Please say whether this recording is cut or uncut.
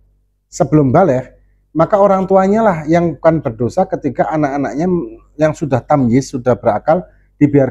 uncut